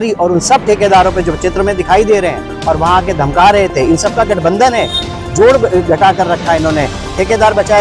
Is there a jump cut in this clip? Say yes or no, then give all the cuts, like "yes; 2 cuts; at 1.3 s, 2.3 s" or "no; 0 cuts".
no; 0 cuts